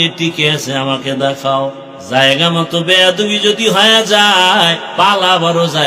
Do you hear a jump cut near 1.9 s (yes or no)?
yes